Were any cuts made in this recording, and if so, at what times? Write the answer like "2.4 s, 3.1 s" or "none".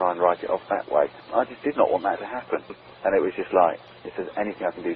2.8 s, 3.9 s